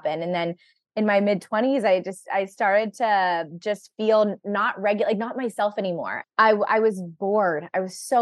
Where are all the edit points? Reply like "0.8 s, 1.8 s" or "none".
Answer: 6.1 s